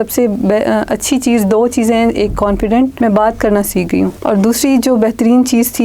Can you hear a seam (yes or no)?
yes